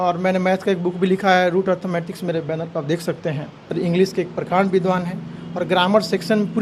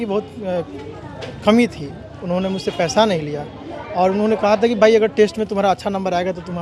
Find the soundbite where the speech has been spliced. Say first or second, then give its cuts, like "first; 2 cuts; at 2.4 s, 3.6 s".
first; 1 cut; at 3.6 s